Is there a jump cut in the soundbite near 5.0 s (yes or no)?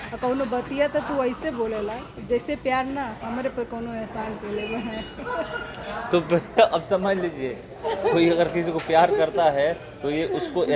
no